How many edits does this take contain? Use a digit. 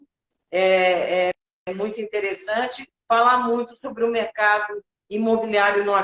0